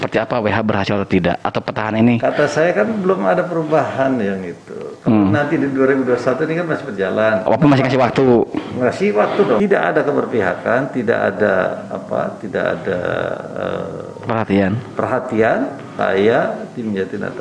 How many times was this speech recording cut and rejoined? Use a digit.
2